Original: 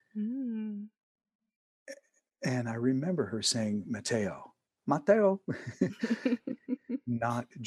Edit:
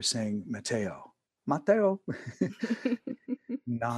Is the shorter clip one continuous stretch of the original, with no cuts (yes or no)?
yes